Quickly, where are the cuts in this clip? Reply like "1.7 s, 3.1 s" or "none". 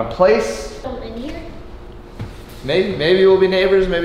0.9 s